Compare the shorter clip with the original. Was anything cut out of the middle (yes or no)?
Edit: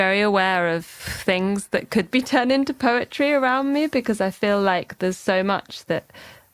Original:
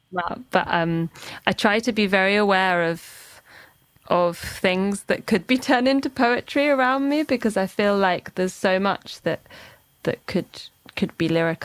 yes